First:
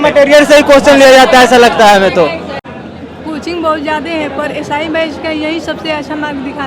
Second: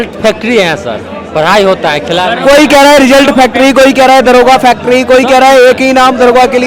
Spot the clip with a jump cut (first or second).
first